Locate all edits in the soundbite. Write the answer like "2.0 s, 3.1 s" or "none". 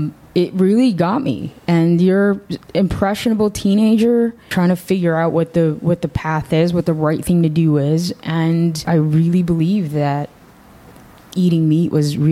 4.5 s, 8.8 s